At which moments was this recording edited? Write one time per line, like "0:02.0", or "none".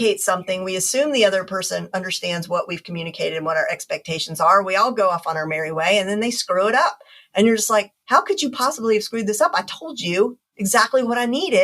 0:10.5